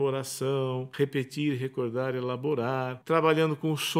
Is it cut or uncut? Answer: cut